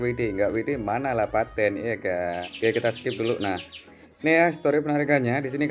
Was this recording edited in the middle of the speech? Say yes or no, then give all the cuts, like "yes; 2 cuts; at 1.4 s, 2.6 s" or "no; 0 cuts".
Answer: yes; 1 cut; at 2.5 s